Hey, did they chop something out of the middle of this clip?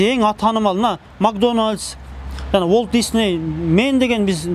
no; 0 cuts

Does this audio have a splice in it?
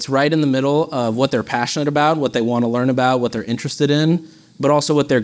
no; 0 cuts

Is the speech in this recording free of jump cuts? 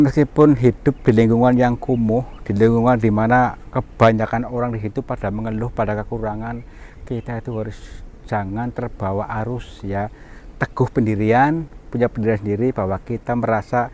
yes; 0 cuts

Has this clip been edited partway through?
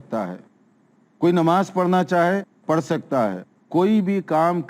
yes; 1 cut; at 3.5 s

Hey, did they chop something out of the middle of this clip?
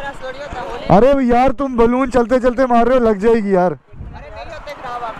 no; 0 cuts

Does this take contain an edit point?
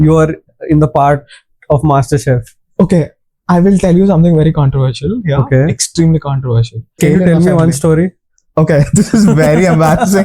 yes; 1 cut; at 7.0 s

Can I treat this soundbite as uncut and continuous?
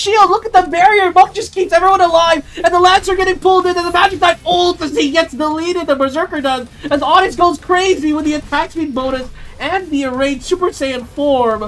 yes; 0 cuts

